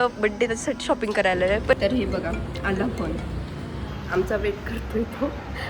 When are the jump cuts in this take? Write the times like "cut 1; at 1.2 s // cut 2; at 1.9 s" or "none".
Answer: cut 1; at 1.8 s

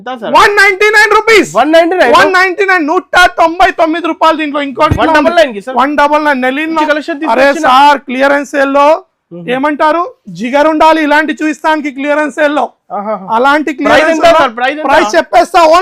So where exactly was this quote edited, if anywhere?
cut 1; at 6.8 s

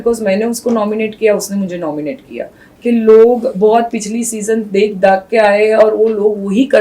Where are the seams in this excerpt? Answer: cut 1; at 2.6 s

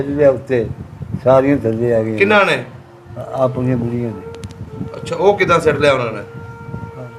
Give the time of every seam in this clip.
none

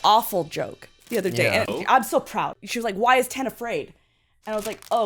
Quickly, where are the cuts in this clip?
cut 1; at 2.6 s

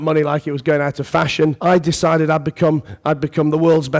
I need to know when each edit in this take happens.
cut 1; at 1.6 s

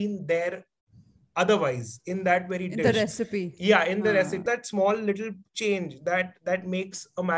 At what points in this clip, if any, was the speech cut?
cut 1; at 4.4 s

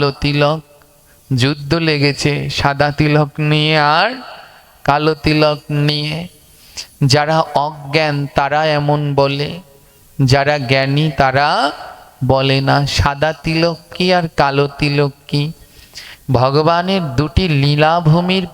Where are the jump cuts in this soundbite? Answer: none

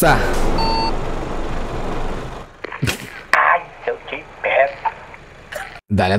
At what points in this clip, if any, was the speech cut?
none

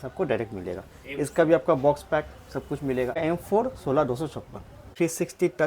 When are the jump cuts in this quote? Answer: cut 1; at 3.2 s // cut 2; at 4.9 s

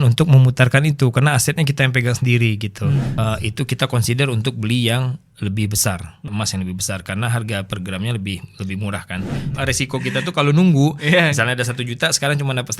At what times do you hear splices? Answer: cut 1; at 3.1 s // cut 2; at 6.3 s // cut 3; at 9.5 s

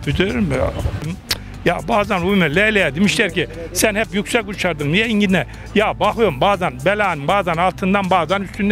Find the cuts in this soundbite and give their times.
cut 1; at 1.0 s

